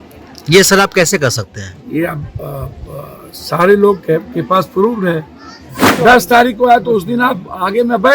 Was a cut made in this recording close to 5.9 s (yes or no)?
yes